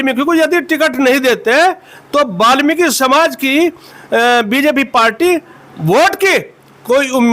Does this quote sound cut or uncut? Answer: uncut